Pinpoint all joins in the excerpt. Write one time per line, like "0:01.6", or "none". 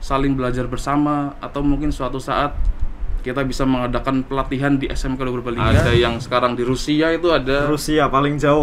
0:05.8